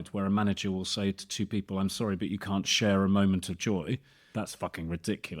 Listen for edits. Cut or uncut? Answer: cut